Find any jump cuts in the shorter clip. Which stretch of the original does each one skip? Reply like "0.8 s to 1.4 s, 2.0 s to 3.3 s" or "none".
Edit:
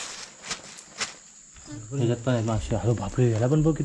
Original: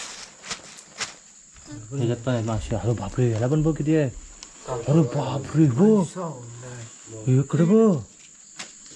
none